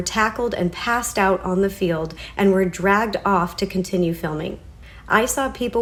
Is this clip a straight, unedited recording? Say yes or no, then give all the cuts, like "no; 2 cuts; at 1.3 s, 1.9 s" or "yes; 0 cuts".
yes; 0 cuts